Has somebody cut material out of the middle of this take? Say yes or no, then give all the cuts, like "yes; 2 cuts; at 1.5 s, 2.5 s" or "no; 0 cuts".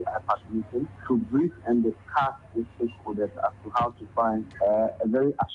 yes; 2 cuts; at 0.9 s, 4.5 s